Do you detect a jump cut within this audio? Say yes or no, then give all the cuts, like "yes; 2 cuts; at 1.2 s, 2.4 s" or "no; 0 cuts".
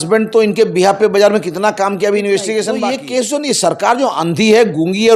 yes; 1 cut; at 3.0 s